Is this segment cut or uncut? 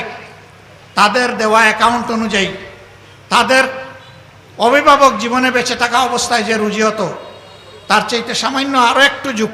uncut